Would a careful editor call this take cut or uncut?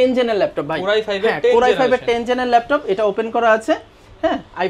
uncut